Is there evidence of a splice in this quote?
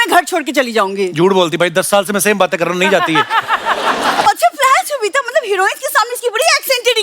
yes; 1 cut; at 4.3 s

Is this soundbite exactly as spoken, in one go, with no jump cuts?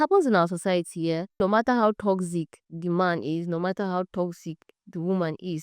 no; 1 cut; at 1.4 s

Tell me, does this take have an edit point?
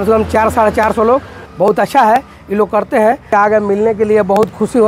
yes; 2 cuts; at 1.4 s, 3.3 s

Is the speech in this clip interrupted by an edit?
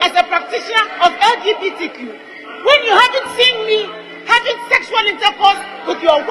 no; 0 cuts

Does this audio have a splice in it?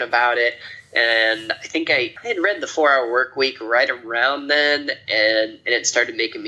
yes; 1 cut; at 2.2 s

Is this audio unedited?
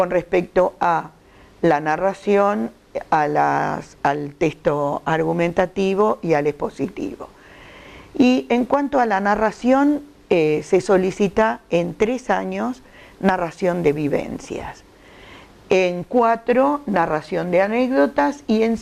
yes; 0 cuts

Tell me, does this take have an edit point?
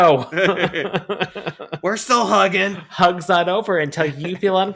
yes; 1 cut; at 2.8 s

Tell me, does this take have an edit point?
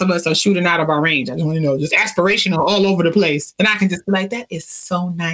yes; 1 cut; at 3.5 s

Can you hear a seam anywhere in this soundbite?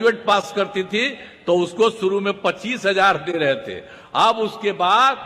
no; 0 cuts

